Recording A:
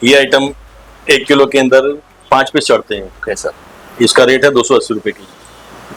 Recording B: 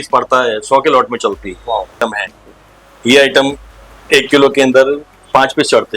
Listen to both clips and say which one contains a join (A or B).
B